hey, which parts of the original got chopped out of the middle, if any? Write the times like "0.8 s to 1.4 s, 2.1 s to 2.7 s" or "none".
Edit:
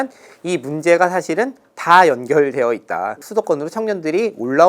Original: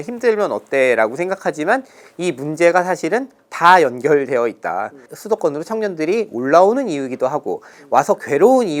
4.9 s to 5.1 s